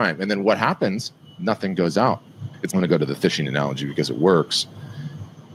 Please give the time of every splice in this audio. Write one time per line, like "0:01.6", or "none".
none